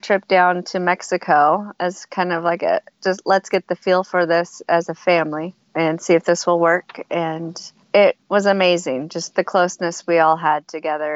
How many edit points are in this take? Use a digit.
0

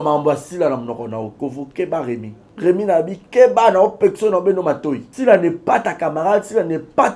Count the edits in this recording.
2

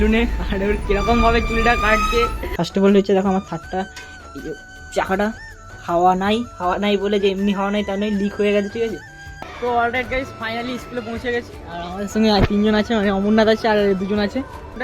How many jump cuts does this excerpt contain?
2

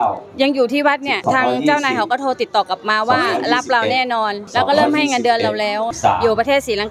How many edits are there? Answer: 0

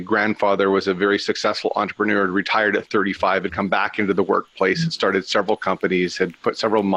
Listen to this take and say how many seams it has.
0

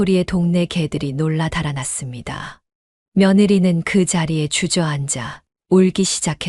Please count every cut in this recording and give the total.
0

